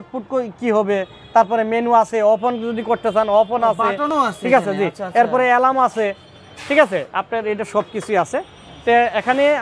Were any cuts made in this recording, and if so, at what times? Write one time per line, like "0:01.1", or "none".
none